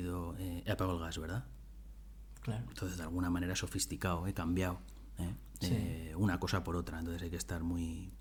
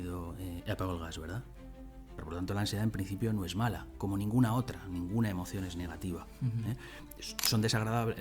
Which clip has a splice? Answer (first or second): second